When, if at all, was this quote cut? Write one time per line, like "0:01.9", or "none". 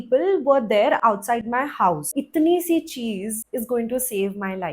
0:02.2
0:03.4